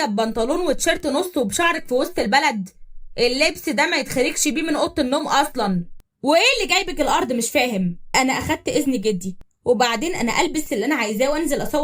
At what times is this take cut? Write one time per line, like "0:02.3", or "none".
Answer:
0:08.0